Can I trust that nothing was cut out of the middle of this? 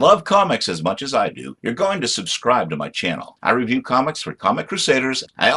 yes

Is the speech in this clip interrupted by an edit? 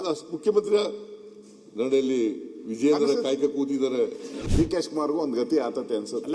yes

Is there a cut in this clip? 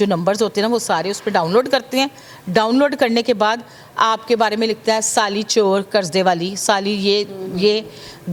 no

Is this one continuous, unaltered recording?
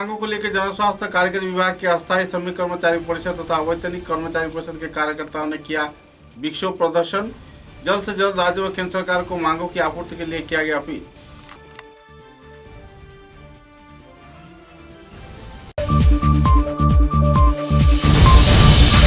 yes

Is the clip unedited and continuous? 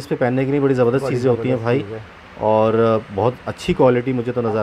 yes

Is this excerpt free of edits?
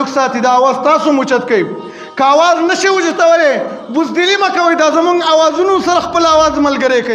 yes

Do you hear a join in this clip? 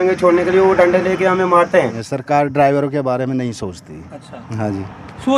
yes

